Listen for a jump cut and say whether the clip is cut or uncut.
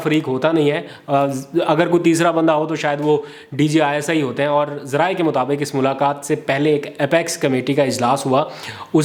uncut